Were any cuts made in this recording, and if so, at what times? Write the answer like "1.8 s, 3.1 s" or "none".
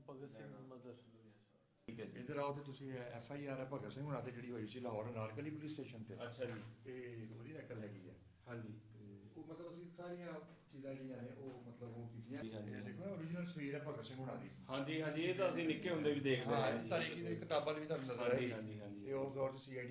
1.9 s, 12.4 s